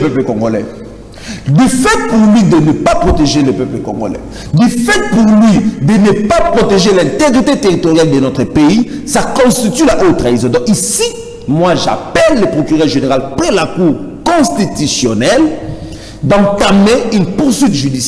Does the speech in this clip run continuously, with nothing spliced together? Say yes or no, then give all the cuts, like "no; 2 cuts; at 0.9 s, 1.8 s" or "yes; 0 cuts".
yes; 0 cuts